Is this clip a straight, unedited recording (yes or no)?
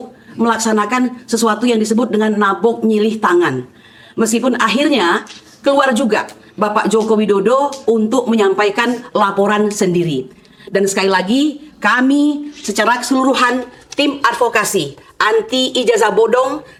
yes